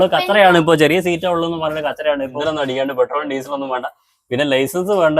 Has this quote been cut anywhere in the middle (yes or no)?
yes